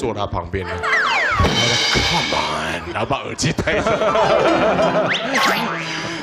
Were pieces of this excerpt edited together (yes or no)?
no